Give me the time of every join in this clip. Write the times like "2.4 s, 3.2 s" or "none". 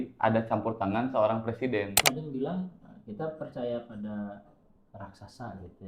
2.0 s